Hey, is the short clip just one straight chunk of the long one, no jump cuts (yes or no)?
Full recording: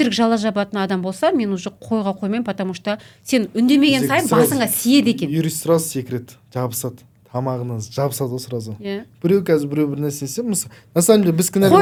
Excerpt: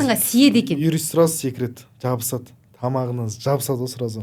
yes